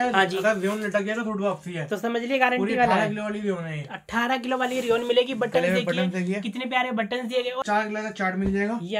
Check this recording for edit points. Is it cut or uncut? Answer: cut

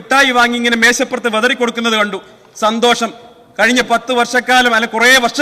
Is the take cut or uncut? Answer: uncut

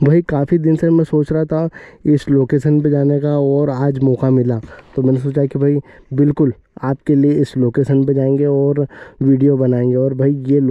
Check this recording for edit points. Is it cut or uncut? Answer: uncut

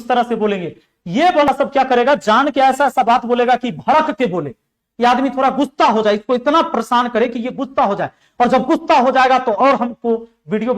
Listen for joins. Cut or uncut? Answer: cut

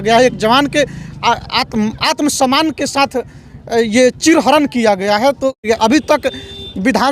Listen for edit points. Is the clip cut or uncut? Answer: cut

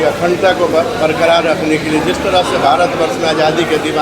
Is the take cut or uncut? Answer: uncut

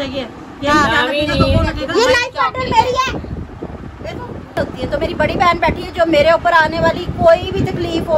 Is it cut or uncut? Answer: cut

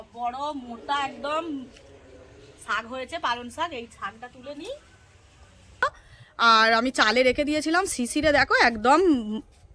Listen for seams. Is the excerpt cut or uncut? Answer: cut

